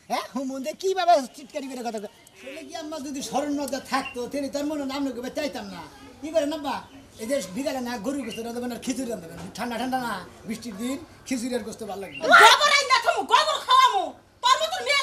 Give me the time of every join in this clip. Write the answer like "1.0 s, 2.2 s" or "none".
2.8 s